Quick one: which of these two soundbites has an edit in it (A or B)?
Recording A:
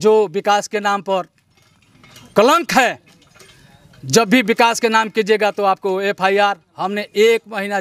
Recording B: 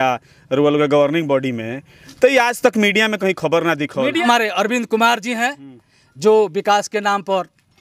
B